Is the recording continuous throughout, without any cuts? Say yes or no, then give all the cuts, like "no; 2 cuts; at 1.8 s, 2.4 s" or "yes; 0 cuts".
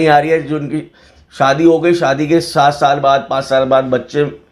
yes; 0 cuts